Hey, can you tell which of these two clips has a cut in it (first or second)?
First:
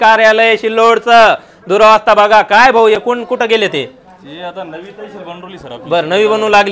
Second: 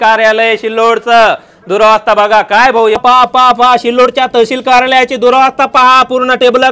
second